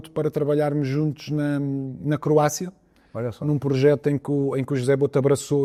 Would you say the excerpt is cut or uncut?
uncut